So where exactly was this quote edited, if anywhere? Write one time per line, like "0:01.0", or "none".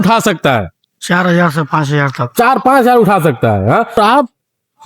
0:03.9